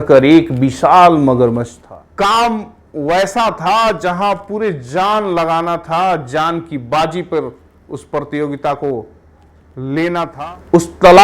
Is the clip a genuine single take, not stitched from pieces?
no; 2 cuts; at 1.8 s, 10.3 s

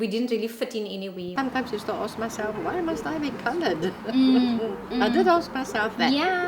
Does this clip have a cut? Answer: yes; 1 cut; at 1.3 s

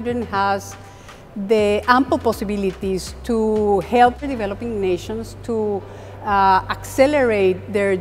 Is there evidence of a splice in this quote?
yes; 1 cut; at 4.2 s

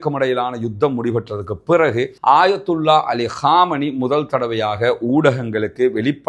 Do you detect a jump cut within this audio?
no; 0 cuts

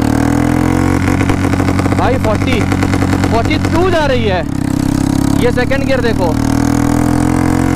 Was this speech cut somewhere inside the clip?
no; 0 cuts

